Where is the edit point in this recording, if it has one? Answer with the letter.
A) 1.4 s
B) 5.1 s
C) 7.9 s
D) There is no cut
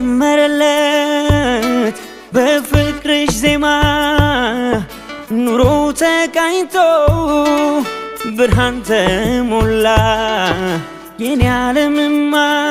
D